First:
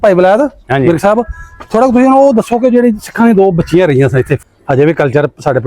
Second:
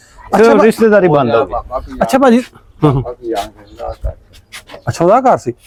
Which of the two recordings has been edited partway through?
first; 1 cut; at 4.4 s

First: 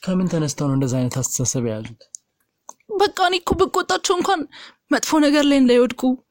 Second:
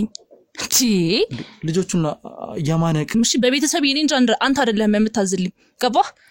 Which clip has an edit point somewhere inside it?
second; 1 cut; at 3.1 s

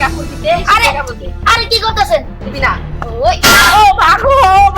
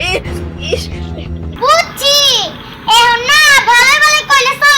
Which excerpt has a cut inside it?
second; 1 cut; at 1.5 s

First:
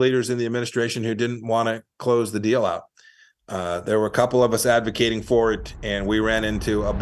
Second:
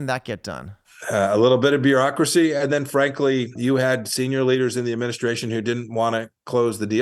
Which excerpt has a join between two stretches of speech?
second; 2 cuts; at 0.9 s, 3.6 s

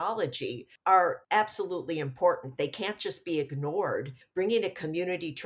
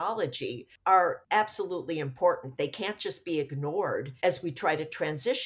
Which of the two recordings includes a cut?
first; 1 cut; at 4.1 s

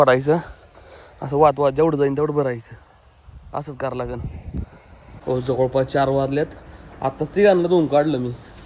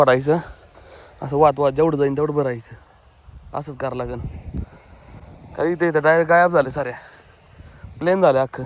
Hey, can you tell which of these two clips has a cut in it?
first; 1 cut; at 5.2 s

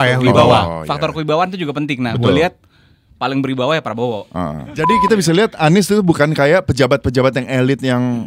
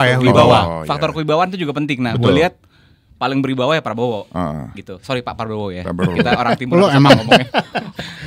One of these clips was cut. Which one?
first; 1 cut; at 4.8 s

